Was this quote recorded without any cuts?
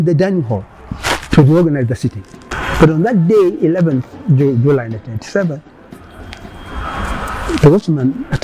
no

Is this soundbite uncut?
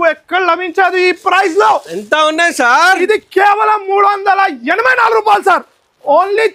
yes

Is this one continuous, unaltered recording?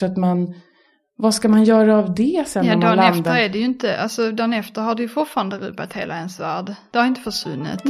no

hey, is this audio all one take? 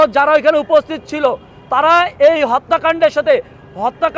yes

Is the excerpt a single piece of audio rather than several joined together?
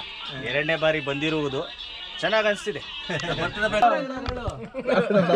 no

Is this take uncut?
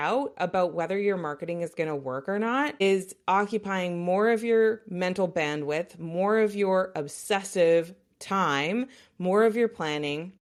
yes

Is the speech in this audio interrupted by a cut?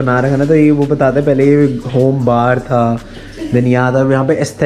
no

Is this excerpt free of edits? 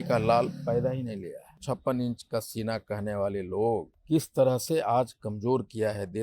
no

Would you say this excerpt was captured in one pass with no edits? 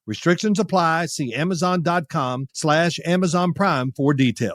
no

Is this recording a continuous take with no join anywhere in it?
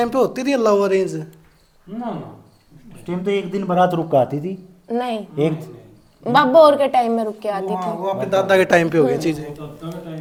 yes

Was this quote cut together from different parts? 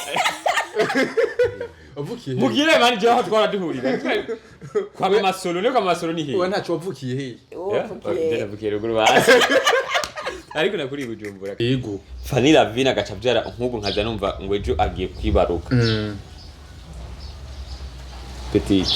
yes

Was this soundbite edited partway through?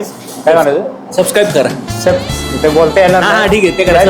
no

